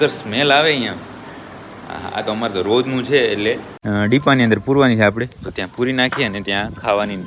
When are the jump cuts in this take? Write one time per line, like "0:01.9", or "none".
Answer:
0:03.7